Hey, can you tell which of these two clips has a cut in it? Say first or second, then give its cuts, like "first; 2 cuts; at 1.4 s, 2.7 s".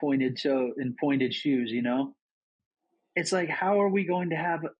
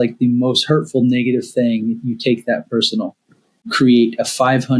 second; 1 cut; at 3.7 s